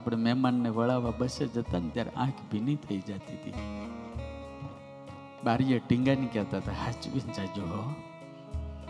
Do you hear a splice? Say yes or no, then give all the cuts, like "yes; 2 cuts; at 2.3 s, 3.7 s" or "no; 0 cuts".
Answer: no; 0 cuts